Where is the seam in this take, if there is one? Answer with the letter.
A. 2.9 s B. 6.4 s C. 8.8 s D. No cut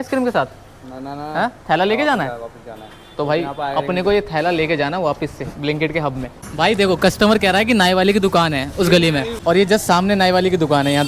B